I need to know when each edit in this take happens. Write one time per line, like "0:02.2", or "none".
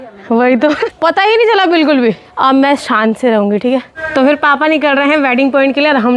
0:00.8
0:02.3
0:04.0